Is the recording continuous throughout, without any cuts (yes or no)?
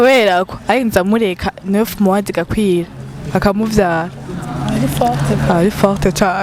yes